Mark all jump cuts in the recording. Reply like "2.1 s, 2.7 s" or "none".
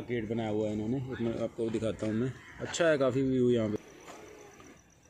3.8 s